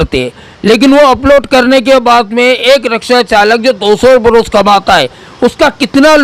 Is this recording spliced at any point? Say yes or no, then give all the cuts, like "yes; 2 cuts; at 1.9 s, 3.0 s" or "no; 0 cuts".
no; 0 cuts